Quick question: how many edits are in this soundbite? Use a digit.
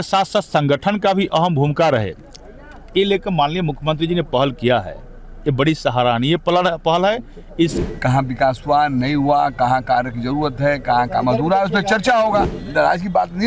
2